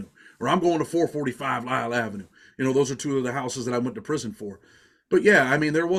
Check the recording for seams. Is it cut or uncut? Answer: uncut